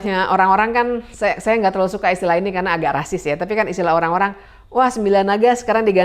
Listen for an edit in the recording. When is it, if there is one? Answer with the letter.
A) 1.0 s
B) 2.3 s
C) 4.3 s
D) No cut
D